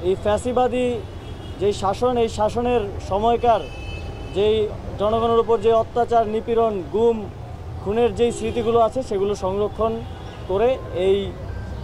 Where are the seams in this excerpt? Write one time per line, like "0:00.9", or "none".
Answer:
none